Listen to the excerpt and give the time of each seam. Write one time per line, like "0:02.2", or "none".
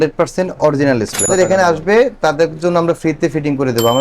0:01.3